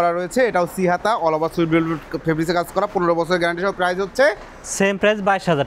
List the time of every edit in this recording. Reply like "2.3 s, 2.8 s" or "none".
none